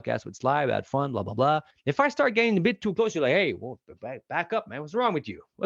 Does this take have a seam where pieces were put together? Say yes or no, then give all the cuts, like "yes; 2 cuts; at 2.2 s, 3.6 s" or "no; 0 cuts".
yes; 1 cut; at 1.7 s